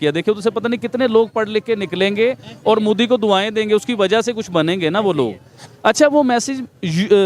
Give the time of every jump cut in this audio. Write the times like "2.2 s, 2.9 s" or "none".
none

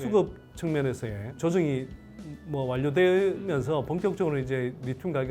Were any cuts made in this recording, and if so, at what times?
1.3 s

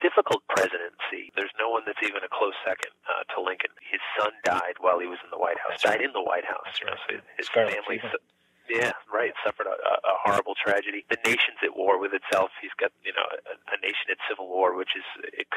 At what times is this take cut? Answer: 1.3 s, 3.7 s, 11.0 s

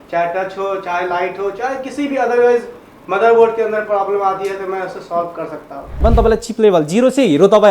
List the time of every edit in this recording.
6.0 s

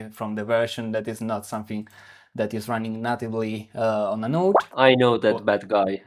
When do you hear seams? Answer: 4.7 s

